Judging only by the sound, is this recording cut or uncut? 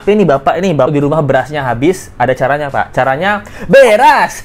cut